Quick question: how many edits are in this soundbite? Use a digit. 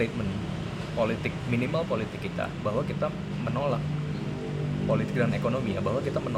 0